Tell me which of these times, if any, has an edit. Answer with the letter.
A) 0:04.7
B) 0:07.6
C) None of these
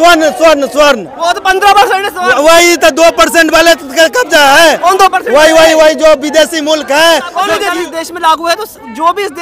B